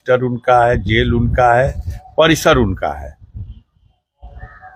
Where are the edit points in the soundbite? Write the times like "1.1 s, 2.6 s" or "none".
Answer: none